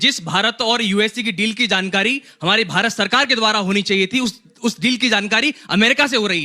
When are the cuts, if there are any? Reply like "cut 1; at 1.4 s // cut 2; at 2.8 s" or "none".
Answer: none